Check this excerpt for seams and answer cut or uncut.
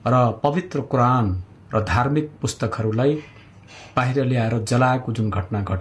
uncut